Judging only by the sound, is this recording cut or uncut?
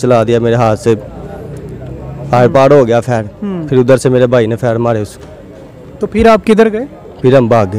uncut